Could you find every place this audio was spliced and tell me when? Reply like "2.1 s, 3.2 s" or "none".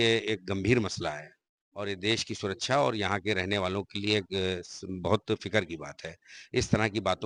none